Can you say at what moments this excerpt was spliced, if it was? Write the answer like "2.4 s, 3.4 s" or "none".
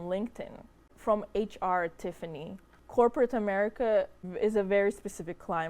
0.9 s, 2.8 s, 4.2 s